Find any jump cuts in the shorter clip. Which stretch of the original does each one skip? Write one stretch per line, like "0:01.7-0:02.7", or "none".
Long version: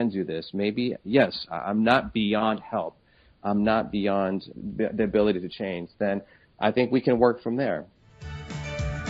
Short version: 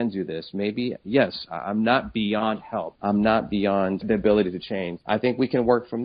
0:02.9-0:03.3
0:04.4-0:04.9
0:05.8-0:06.5